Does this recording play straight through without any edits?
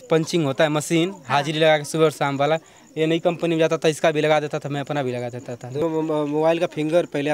no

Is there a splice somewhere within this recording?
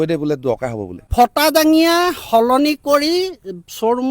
yes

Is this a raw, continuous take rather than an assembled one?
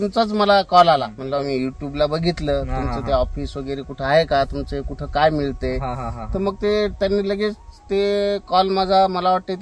no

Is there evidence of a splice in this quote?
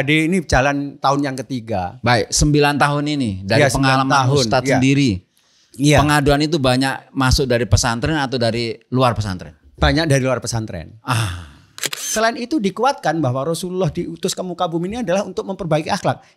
yes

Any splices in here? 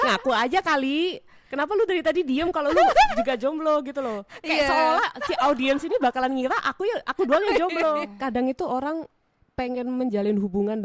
yes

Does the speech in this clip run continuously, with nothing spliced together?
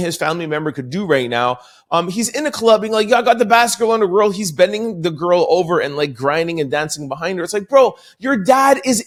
yes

